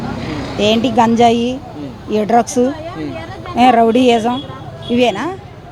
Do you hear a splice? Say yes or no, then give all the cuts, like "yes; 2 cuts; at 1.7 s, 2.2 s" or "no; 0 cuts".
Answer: no; 0 cuts